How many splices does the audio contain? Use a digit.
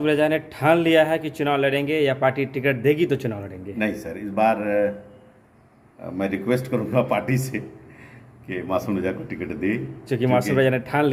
0